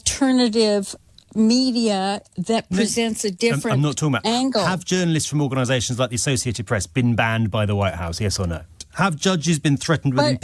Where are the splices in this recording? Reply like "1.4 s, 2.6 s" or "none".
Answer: 8.8 s